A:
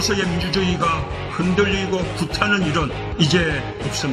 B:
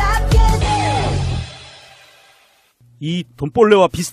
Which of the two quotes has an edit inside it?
A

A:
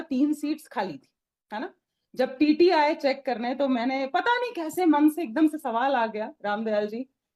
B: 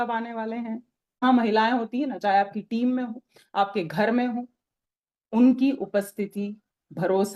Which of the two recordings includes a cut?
B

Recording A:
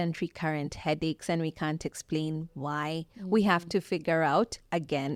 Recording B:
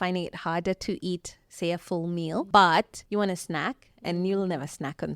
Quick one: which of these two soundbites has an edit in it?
B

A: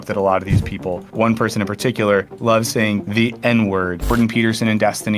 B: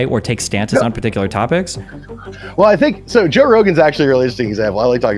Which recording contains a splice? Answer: A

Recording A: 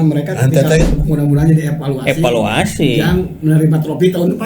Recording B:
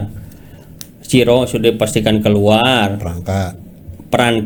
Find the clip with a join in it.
A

